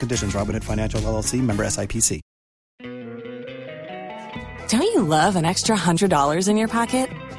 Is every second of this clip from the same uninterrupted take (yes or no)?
no